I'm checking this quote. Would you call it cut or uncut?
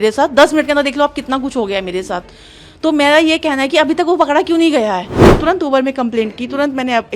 cut